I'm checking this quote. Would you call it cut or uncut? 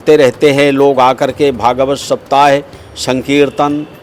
uncut